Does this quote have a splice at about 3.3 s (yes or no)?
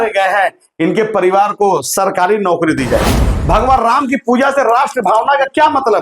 yes